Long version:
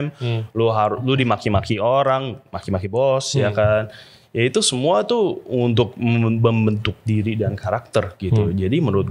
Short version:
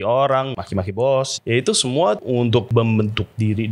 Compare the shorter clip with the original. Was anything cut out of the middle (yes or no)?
yes